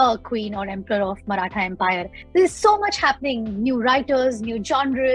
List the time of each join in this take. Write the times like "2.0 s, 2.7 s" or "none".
2.1 s